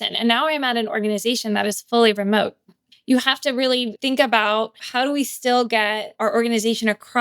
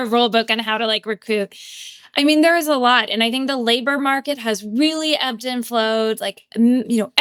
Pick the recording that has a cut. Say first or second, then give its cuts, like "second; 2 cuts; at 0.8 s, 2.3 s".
first; 4 cuts; at 2.8 s, 3.9 s, 4.8 s, 6.1 s